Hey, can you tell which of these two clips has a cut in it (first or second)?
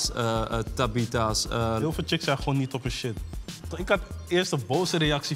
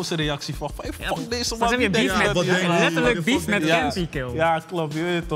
first